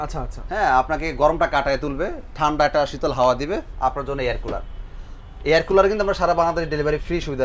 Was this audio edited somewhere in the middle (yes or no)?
no